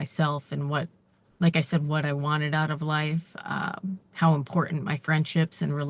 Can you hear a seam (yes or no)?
no